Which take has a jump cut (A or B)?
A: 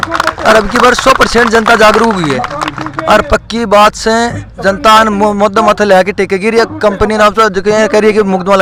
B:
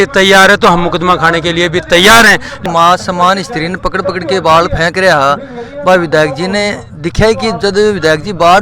B